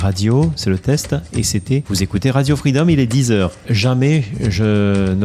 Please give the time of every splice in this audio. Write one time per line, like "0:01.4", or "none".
0:01.9
0:03.6